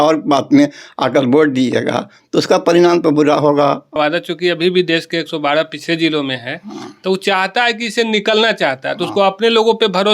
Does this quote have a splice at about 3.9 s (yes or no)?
yes